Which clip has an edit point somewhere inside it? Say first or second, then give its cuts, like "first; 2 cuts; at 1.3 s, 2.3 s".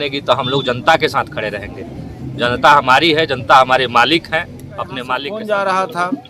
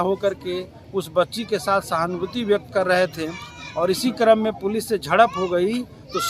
first; 1 cut; at 5.1 s